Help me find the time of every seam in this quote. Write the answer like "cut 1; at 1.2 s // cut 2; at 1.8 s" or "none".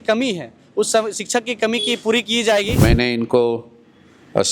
cut 1; at 2.8 s